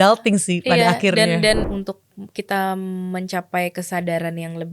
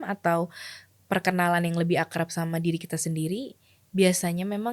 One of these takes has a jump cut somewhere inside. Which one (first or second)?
first